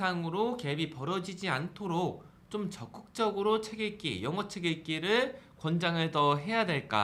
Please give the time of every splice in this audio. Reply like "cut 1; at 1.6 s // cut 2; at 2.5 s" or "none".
none